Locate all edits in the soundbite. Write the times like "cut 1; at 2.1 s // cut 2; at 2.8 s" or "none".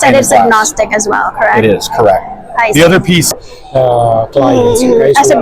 cut 1; at 3.3 s